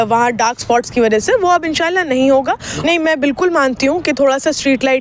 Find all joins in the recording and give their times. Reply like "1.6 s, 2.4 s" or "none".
2.7 s